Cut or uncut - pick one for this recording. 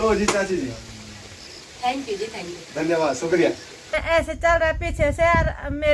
cut